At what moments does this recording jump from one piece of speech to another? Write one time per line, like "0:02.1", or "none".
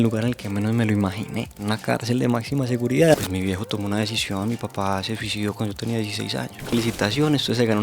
0:01.5
0:03.1
0:06.7

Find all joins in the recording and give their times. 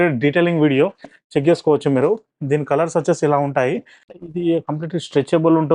0:04.1

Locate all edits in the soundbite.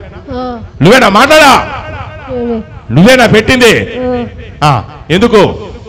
none

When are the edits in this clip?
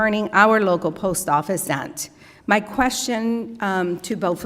0:01.6

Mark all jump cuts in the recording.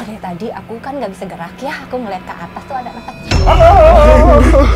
0:03.3

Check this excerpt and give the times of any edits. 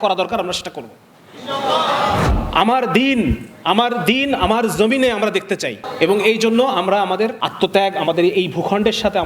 0:02.2
0:05.8
0:07.4

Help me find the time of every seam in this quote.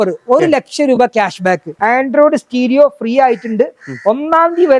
0:01.7

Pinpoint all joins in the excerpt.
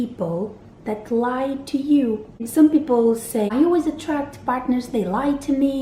0:02.5
0:03.5

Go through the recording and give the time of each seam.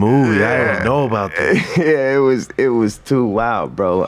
none

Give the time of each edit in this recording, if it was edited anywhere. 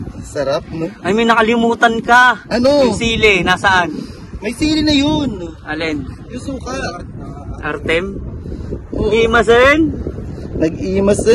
none

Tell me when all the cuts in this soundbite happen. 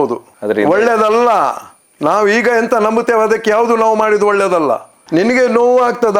0:04.9

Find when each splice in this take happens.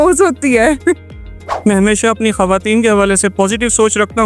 0:01.5

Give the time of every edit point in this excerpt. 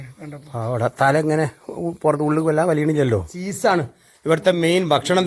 0:03.4

